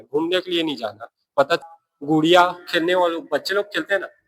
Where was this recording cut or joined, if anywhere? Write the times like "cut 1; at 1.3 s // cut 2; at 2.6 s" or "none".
cut 1; at 1.6 s